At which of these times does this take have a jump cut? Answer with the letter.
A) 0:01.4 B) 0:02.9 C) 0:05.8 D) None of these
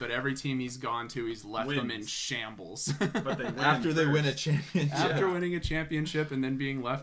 D